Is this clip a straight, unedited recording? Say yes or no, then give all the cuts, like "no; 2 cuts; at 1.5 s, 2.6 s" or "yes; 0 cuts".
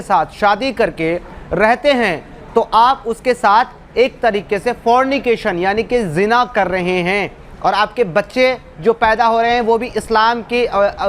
yes; 0 cuts